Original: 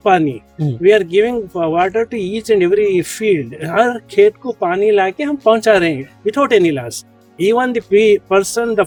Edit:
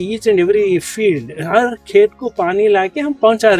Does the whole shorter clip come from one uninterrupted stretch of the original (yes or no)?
yes